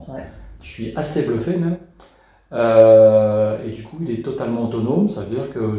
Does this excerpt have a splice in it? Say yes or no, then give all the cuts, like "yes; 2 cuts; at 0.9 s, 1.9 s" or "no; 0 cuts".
no; 0 cuts